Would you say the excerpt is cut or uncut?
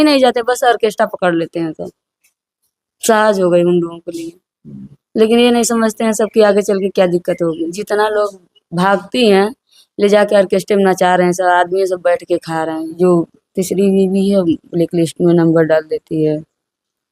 cut